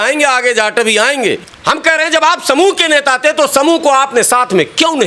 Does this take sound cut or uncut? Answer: cut